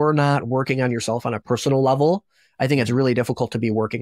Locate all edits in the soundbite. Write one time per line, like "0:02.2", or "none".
0:01.4